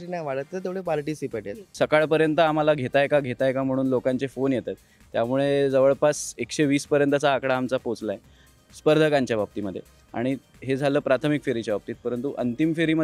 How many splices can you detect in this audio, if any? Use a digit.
1